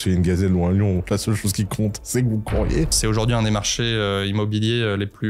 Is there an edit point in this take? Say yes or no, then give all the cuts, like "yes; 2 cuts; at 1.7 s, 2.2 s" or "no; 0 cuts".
yes; 1 cut; at 3.0 s